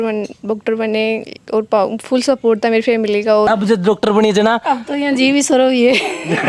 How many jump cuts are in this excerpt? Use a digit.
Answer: 1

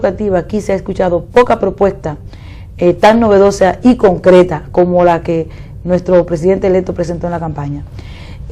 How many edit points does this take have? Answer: 0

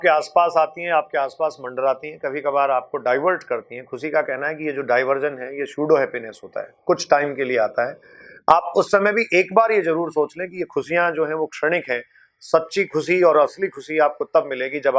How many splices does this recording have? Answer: 0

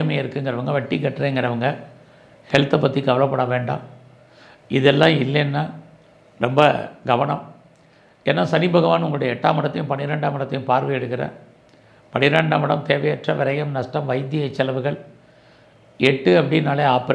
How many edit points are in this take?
0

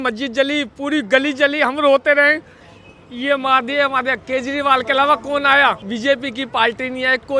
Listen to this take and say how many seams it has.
1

